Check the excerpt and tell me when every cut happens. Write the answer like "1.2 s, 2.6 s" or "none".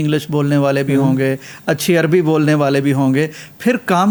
none